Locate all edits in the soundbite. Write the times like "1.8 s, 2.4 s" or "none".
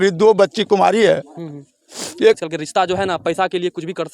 2.4 s

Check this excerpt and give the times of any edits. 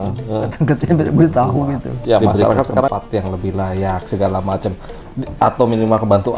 2.9 s

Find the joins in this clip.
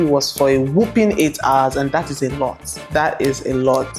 none

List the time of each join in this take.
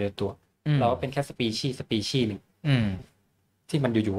none

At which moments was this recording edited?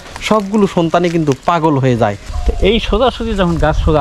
2.3 s

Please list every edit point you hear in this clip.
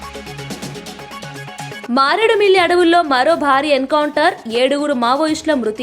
1.9 s

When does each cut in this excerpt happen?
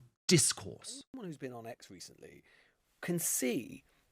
1.2 s

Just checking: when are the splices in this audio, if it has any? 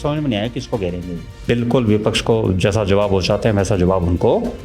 1.4 s

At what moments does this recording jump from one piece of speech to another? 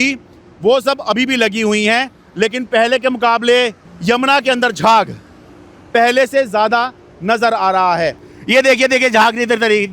3.8 s, 8.3 s

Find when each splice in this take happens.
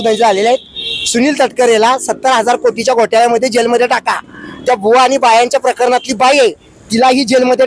none

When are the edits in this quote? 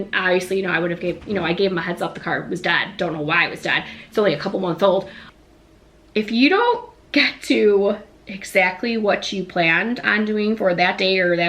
5.2 s

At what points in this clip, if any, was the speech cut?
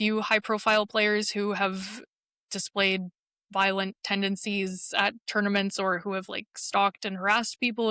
none

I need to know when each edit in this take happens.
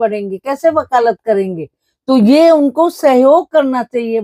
none

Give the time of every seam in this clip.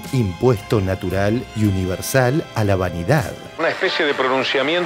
3.4 s

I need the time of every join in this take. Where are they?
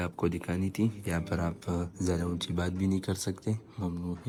none

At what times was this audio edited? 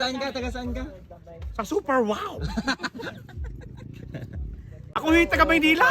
4.9 s

